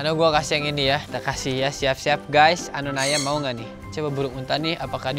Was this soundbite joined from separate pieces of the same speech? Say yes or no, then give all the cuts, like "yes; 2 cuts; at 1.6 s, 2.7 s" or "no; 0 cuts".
yes; 2 cuts; at 1.1 s, 3.8 s